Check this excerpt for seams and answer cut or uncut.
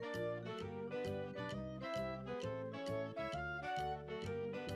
uncut